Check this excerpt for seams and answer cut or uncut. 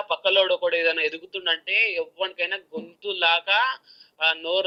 uncut